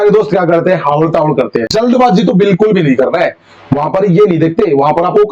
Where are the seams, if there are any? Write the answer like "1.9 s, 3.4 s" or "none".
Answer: 1.7 s